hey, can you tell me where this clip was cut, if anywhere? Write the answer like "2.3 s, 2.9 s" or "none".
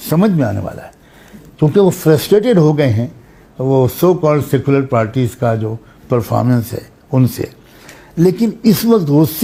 none